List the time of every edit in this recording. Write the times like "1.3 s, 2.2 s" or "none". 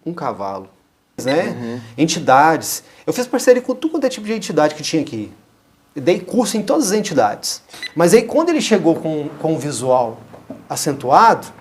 1.2 s, 7.8 s